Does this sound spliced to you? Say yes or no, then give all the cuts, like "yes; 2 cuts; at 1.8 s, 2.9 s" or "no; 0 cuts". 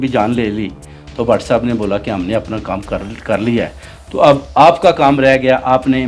no; 0 cuts